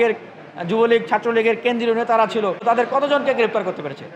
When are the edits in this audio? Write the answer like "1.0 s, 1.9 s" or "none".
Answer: 2.6 s